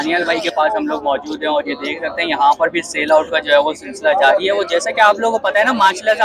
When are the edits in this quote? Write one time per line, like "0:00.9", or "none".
none